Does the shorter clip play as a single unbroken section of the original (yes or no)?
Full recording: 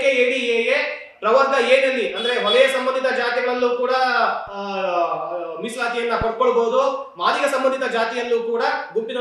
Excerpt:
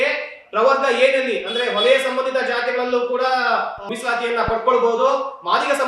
no